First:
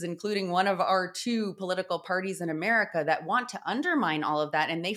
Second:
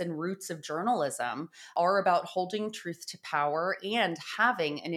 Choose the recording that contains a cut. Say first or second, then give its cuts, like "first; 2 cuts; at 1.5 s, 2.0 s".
second; 1 cut; at 1.7 s